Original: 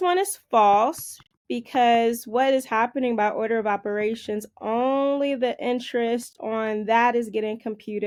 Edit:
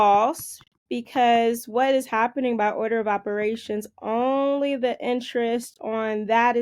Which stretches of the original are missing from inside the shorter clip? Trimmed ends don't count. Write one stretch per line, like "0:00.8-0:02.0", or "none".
none

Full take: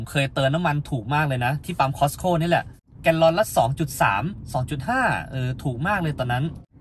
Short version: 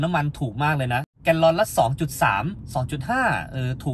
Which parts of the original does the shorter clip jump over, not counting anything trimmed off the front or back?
0:01.6-0:02.9

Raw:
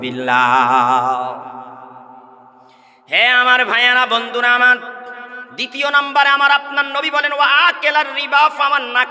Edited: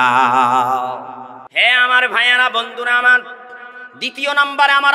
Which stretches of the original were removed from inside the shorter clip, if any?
0:01.7-0:02.9

